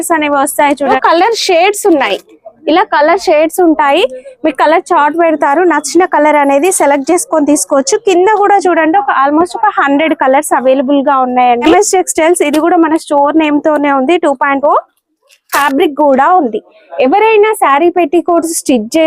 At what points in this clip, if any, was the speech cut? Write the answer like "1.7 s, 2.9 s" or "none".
0.9 s, 11.6 s, 15.6 s